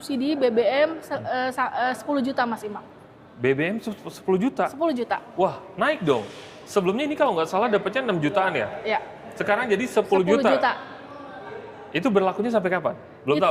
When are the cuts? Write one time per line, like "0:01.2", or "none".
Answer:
none

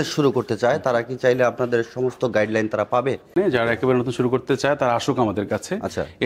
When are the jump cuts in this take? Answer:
0:03.3

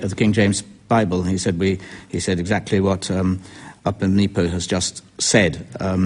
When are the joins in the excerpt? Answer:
0:02.1

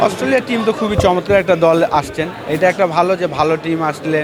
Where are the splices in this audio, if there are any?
none

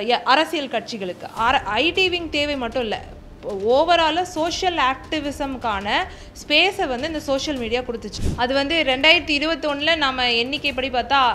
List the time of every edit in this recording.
0:08.1

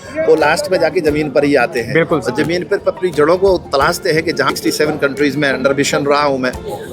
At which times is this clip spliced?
0:04.5

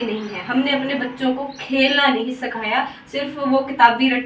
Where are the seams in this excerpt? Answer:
none

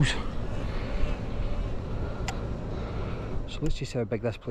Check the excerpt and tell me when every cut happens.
none

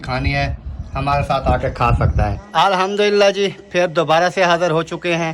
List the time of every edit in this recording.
0:02.4

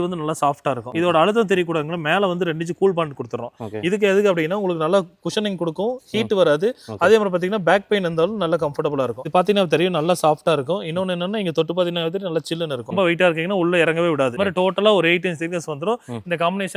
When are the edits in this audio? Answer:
0:00.9
0:09.2
0:12.9
0:14.4

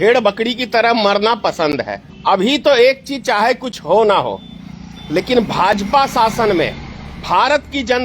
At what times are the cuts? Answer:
0:02.0

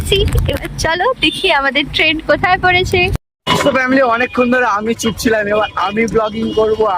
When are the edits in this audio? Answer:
0:03.3

